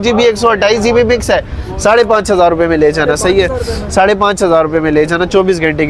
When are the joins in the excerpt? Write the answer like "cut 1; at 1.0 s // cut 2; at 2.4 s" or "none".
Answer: none